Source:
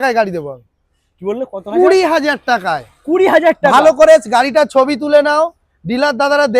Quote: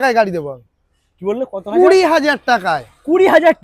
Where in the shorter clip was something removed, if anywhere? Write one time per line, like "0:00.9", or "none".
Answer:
none